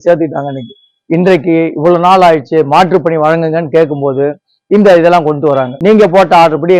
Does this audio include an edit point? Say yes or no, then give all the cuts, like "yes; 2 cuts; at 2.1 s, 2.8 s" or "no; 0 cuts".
yes; 1 cut; at 5.7 s